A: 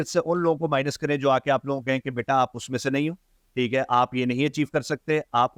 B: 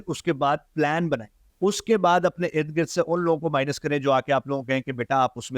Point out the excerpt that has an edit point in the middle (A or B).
B